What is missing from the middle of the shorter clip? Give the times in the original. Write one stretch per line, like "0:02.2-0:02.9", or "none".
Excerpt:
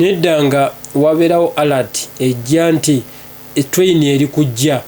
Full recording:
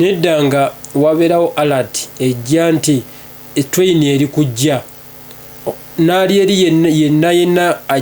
none